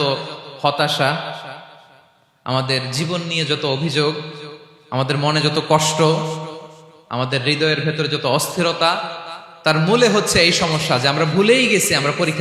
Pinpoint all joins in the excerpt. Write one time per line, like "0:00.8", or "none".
none

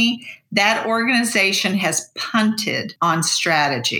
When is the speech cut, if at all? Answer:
0:02.9

